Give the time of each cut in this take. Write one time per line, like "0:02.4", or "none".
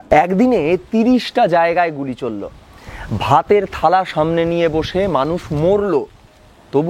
none